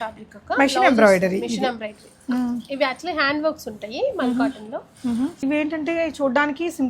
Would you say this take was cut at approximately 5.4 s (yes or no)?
yes